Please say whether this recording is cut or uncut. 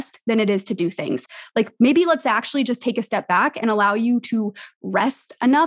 cut